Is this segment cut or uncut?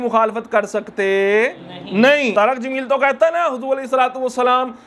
cut